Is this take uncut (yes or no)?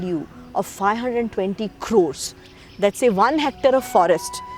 no